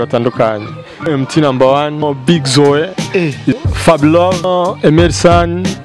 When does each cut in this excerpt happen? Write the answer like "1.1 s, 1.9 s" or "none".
1.1 s, 2.0 s, 3.6 s, 4.4 s